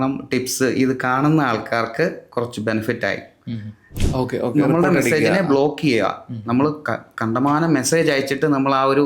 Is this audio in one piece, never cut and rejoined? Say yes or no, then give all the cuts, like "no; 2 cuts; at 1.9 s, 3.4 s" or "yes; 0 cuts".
no; 1 cut; at 3.9 s